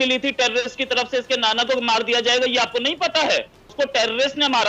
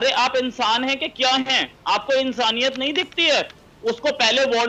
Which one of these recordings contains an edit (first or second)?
first